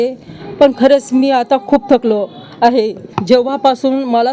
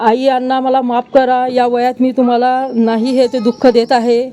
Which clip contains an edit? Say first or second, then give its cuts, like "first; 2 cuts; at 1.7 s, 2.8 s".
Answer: first; 1 cut; at 3.1 s